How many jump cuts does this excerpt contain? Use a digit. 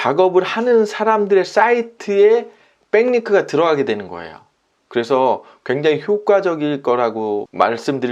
0